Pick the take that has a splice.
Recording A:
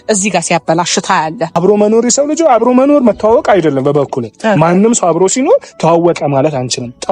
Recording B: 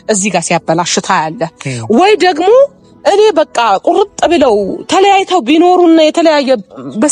A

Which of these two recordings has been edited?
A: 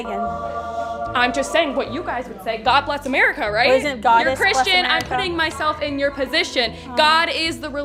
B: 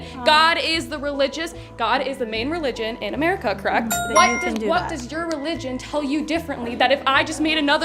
B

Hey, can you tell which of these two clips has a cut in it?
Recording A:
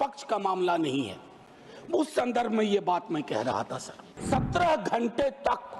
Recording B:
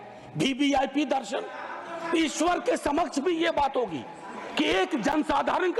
A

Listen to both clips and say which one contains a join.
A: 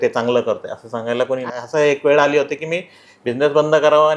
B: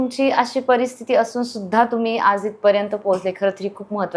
A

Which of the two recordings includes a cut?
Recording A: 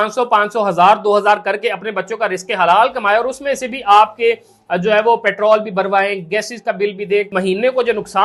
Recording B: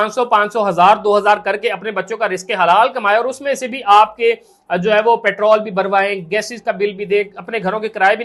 A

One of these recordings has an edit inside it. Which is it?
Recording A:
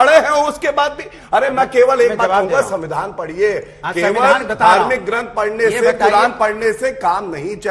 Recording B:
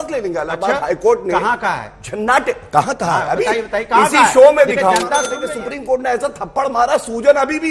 B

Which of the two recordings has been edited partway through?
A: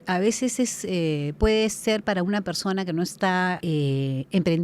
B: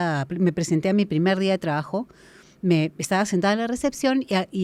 A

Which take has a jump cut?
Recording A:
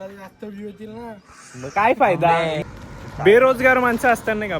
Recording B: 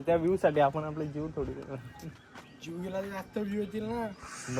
A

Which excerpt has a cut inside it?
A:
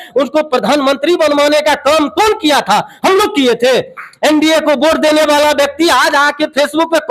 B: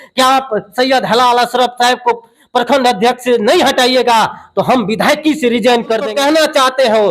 B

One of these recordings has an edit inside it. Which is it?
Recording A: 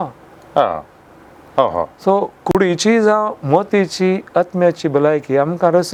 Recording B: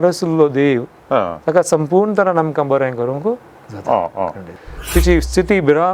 B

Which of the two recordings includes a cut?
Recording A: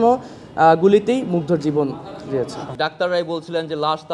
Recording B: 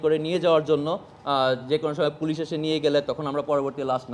A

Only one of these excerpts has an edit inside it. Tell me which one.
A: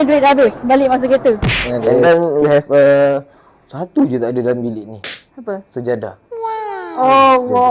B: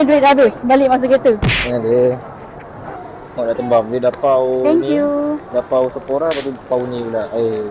A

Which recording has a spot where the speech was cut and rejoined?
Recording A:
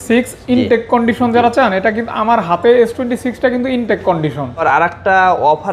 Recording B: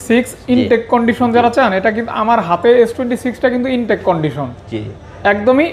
A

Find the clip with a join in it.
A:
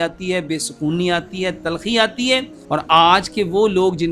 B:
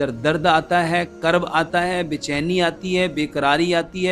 A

